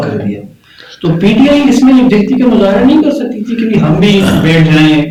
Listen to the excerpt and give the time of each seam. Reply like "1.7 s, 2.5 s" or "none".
none